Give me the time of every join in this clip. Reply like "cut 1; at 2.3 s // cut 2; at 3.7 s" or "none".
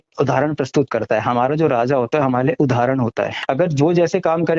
cut 1; at 3.4 s

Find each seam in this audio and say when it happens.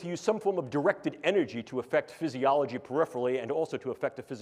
none

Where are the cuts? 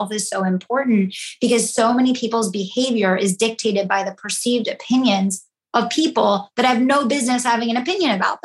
none

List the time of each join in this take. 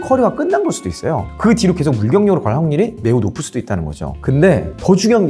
cut 1; at 4.1 s

